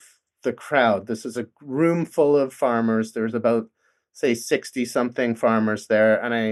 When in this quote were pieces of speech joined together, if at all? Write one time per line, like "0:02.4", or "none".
none